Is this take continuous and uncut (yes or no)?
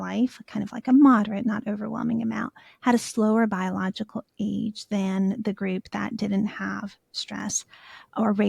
yes